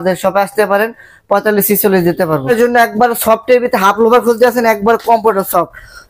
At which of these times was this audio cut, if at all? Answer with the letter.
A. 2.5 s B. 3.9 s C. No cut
A